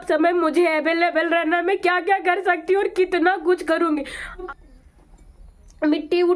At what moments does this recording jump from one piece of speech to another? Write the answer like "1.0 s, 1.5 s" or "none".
4.5 s